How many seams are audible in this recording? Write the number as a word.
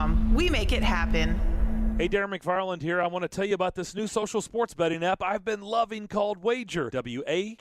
one